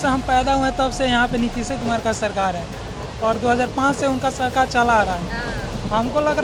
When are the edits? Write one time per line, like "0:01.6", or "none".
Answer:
none